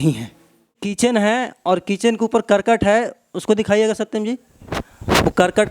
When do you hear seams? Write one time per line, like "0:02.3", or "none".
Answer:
0:00.9